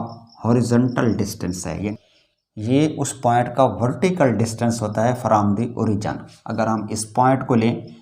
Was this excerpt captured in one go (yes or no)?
no